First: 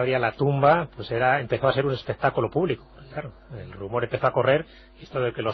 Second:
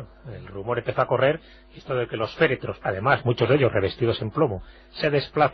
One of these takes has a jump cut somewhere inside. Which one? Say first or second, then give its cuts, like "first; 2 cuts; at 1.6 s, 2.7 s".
first; 1 cut; at 1.3 s